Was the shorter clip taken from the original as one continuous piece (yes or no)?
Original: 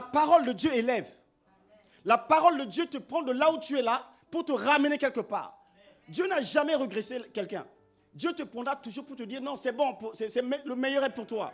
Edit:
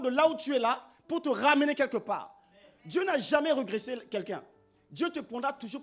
yes